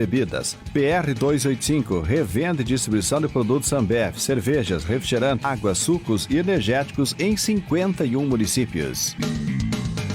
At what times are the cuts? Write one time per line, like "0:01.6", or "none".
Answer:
0:05.4